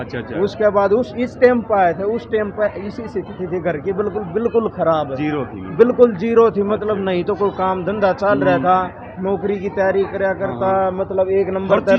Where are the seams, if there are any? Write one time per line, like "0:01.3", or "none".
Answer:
none